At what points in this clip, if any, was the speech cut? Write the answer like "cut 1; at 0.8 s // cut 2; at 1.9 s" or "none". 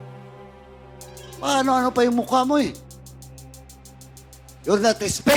none

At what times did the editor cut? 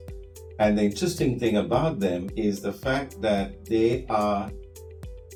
none

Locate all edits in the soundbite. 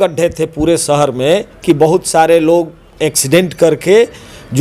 none

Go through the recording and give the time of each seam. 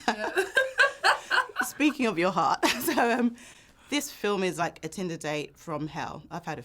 none

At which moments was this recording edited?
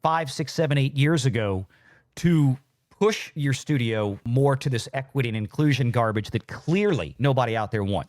cut 1; at 4.3 s // cut 2; at 7.1 s

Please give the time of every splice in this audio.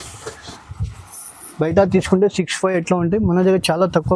none

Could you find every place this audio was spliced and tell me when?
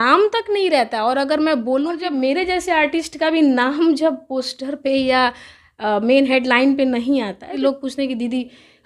cut 1; at 1.9 s // cut 2; at 7.6 s

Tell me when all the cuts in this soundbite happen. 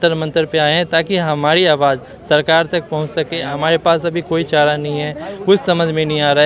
cut 1; at 3.4 s

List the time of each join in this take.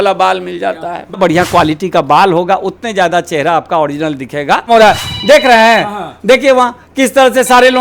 cut 1; at 1.2 s // cut 2; at 4.7 s

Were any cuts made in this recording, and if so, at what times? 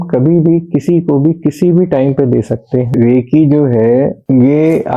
cut 1; at 2.9 s

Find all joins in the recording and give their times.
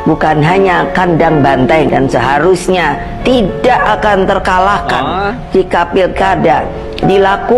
none

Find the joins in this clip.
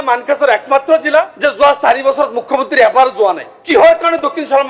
cut 1; at 1.3 s // cut 2; at 3.5 s

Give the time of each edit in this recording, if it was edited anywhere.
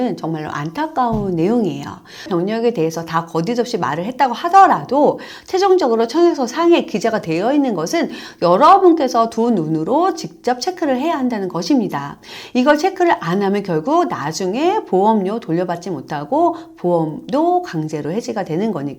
cut 1; at 2.3 s

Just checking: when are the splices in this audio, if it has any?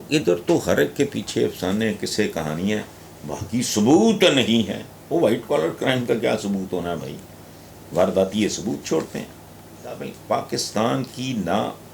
cut 1; at 10.0 s

